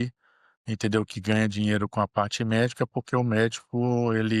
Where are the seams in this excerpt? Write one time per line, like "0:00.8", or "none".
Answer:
none

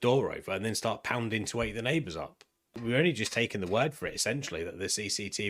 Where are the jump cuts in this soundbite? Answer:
0:02.6

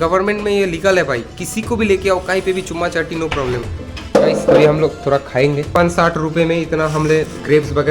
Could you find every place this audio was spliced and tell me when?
0:05.7

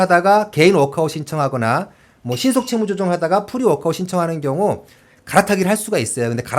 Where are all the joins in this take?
none

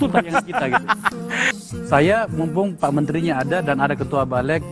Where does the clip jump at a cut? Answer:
0:01.1

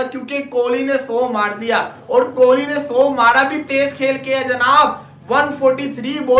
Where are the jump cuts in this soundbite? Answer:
none

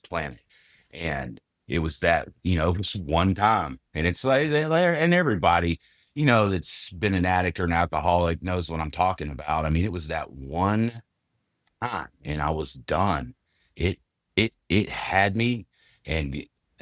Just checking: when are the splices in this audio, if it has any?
none

